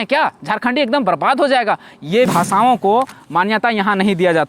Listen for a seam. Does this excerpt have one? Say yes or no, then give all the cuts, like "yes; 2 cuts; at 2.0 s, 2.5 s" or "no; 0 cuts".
yes; 1 cut; at 2.3 s